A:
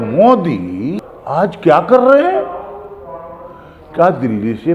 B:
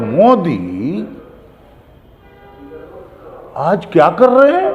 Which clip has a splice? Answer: A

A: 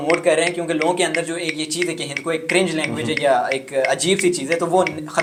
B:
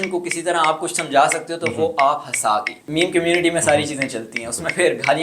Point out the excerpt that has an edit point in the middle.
B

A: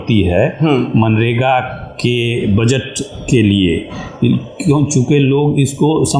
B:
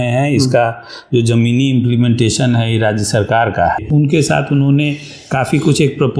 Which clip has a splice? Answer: B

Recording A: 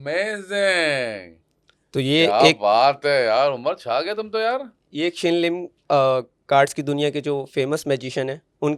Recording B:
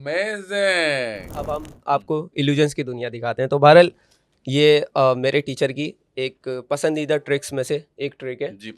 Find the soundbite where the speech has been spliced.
B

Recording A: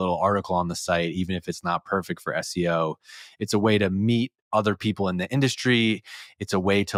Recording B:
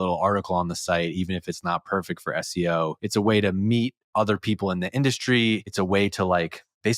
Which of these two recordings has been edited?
B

